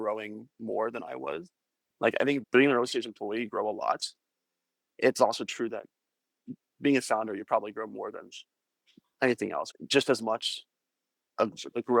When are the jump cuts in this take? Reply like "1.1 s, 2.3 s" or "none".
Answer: 2.4 s, 6.7 s, 9.7 s